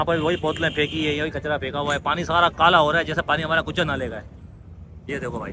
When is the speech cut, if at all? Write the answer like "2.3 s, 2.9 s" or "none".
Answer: none